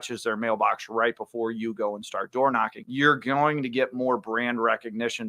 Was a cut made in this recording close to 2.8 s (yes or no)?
yes